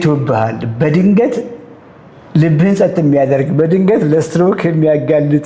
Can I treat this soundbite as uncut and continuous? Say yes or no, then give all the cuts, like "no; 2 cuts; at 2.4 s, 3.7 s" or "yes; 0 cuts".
yes; 0 cuts